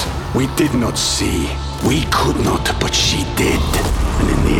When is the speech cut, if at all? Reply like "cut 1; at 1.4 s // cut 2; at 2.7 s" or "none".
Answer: none